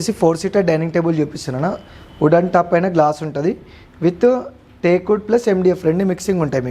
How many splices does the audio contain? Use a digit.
0